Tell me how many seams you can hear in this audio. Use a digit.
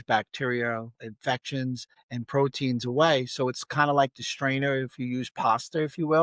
2